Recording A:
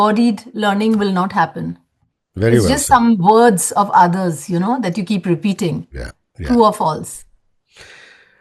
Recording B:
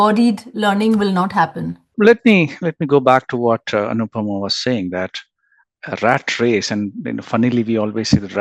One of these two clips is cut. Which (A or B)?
B